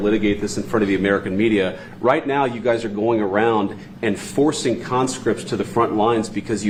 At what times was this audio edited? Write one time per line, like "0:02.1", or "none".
none

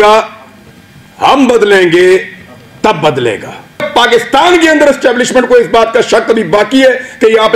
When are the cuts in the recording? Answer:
0:03.8

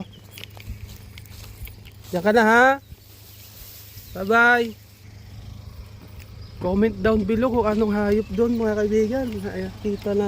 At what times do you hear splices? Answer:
0:05.0

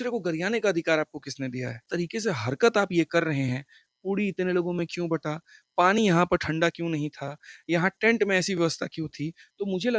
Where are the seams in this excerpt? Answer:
0:01.9

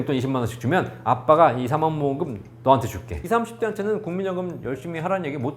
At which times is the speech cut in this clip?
0:03.1

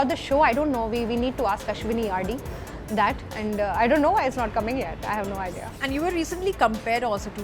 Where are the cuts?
0:05.7

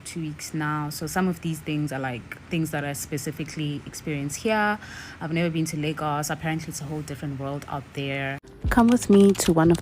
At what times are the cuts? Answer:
0:08.5

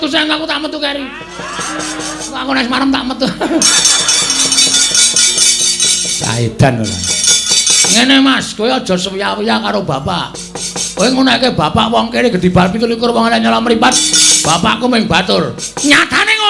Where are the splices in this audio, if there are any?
0:02.2

